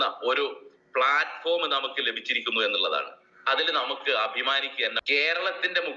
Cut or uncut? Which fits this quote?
cut